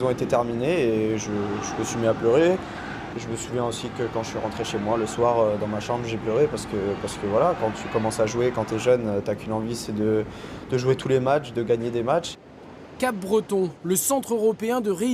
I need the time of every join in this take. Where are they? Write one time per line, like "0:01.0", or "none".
none